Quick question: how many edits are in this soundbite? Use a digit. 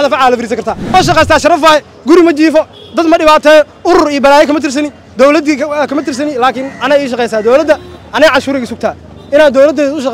1